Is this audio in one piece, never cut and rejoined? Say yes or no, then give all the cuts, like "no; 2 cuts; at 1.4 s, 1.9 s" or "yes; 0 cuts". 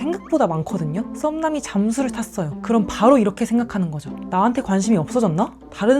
no; 2 cuts; at 1.1 s, 2.5 s